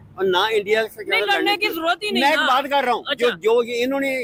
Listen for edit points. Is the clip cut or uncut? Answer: uncut